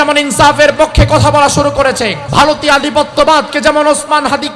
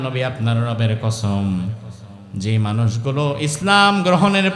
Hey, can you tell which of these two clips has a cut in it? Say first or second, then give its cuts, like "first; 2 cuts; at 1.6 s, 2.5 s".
first; 1 cut; at 2.2 s